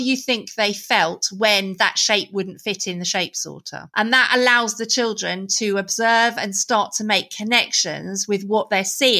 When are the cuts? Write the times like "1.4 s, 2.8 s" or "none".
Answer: none